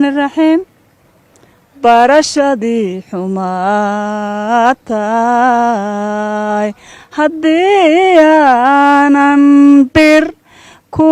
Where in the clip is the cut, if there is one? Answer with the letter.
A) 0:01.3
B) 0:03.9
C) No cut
C